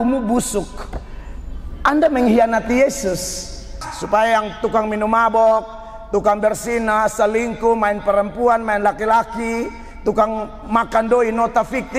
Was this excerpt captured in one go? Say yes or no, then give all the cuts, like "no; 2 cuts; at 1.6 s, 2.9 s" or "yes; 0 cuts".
no; 1 cut; at 3.8 s